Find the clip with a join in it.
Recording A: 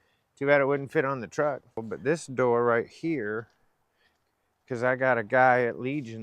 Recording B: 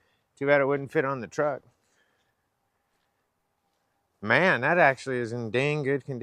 A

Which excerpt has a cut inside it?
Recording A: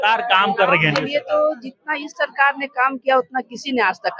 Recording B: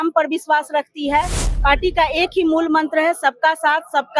B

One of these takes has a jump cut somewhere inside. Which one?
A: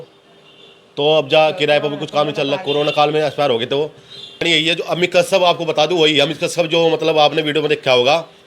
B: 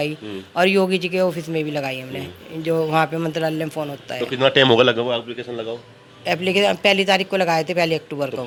A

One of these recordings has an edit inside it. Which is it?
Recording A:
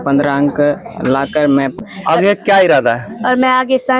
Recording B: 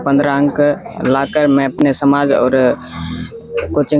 A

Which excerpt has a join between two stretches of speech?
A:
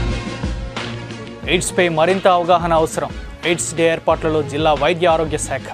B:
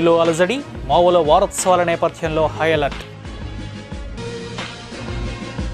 A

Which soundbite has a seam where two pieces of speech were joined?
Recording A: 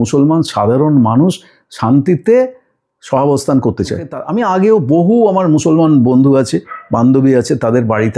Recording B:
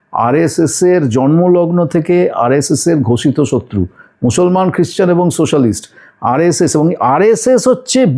A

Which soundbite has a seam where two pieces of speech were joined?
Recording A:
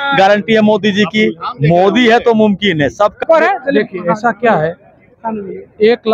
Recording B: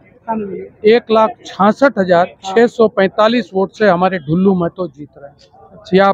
A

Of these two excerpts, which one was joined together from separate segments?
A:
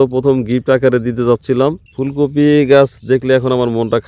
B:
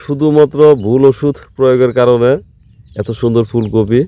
A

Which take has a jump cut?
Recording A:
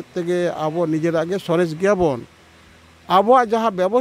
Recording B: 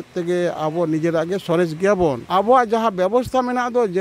B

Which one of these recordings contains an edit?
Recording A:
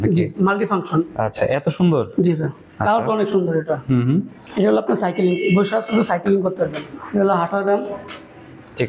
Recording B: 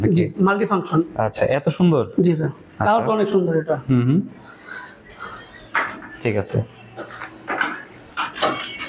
A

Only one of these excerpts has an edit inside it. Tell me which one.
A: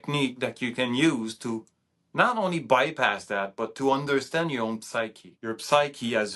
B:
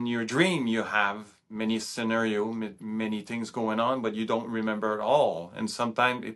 A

